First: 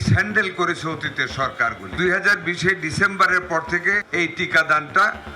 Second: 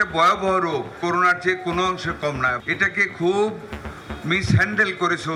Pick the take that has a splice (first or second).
first